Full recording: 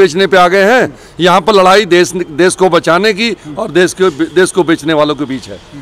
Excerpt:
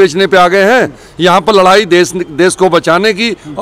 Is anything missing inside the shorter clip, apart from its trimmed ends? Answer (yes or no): no